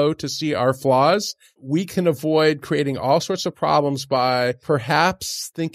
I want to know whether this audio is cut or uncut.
cut